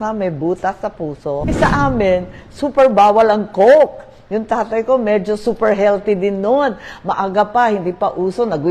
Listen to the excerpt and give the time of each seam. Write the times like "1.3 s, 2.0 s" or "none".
1.5 s